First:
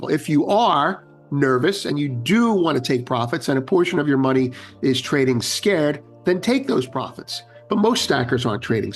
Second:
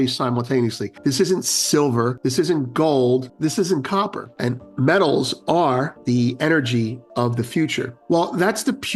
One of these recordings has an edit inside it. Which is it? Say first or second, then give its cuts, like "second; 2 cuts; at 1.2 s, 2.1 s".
second; 6 cuts; at 0.9 s, 2.2 s, 3.3 s, 4.2 s, 5.9 s, 8.0 s